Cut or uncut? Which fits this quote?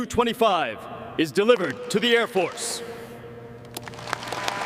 uncut